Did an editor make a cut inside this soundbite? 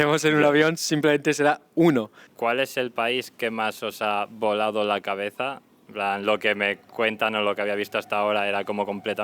yes; 2 cuts; at 2.2 s, 5.8 s

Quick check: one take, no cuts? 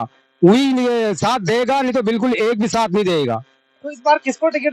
yes; 0 cuts

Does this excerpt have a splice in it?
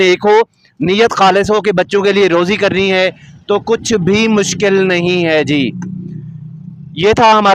no; 0 cuts

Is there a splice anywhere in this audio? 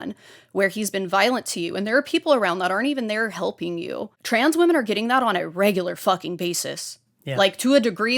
no; 0 cuts

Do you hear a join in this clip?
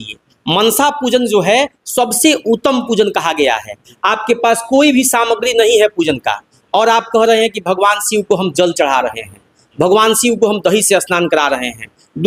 no; 0 cuts

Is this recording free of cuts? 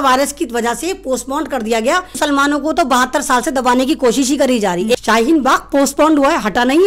no; 2 cuts; at 2.2 s, 5.0 s

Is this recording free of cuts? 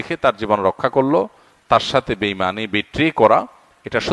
yes; 0 cuts

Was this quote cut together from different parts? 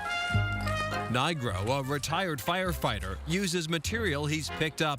yes; 1 cut; at 1.0 s

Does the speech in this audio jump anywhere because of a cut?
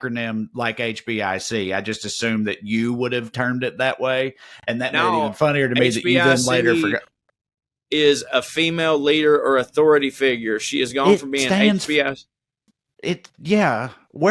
no; 0 cuts

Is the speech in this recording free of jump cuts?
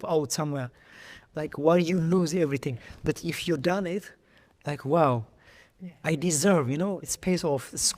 no; 1 cut; at 7.1 s

